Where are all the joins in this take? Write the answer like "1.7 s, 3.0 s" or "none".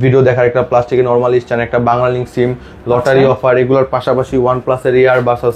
none